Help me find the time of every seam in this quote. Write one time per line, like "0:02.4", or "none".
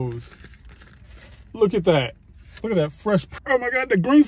0:03.3